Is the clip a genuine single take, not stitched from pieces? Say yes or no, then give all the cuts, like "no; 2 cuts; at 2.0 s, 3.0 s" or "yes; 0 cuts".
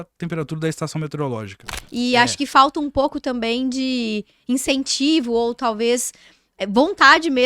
no; 1 cut; at 1.6 s